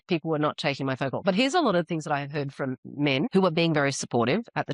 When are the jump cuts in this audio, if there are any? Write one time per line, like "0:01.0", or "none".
0:03.3